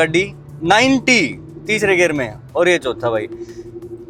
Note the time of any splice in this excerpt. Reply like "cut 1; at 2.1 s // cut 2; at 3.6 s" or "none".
none